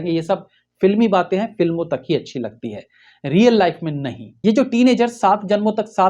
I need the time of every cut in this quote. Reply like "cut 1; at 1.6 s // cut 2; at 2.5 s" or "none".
cut 1; at 4.2 s